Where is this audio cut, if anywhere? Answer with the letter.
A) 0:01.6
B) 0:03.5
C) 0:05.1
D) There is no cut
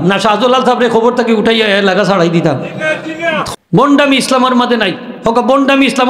B